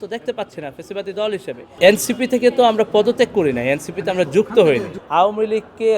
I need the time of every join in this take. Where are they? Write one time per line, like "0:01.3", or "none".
0:01.6
0:05.0